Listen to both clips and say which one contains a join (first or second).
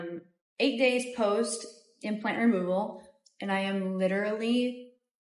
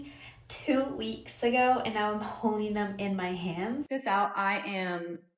second